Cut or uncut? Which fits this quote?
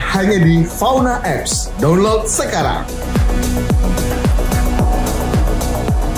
uncut